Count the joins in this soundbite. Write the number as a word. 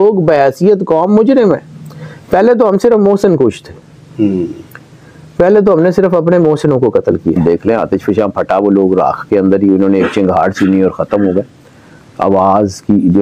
one